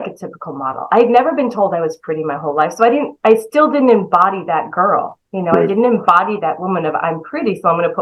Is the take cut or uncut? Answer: uncut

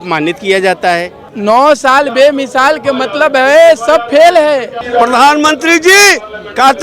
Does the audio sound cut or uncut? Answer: cut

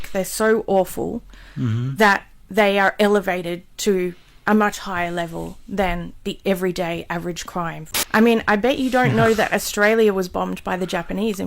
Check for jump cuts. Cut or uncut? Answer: cut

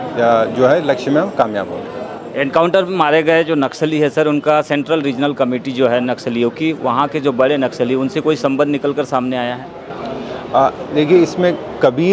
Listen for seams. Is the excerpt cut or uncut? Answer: uncut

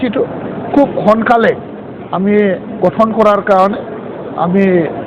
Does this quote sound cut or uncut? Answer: uncut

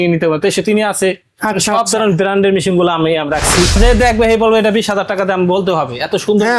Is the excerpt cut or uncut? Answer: cut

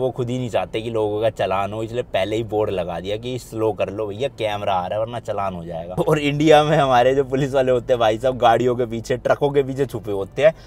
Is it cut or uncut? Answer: uncut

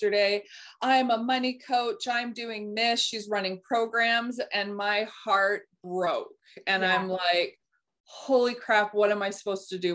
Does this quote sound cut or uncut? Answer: uncut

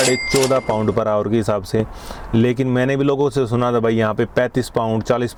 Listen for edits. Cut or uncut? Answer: uncut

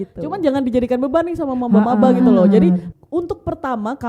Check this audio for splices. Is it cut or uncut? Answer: cut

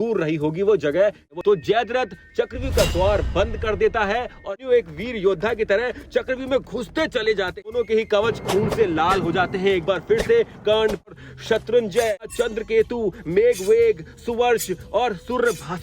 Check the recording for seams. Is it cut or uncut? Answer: cut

